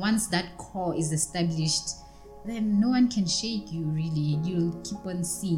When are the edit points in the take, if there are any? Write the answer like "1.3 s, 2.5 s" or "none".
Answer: none